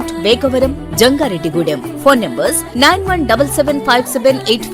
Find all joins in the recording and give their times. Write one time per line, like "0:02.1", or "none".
none